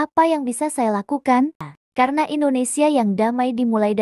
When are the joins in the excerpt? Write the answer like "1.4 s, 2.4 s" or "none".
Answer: 1.6 s